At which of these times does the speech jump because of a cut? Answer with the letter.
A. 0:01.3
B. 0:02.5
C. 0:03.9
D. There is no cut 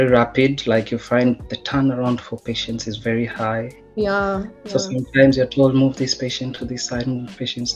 D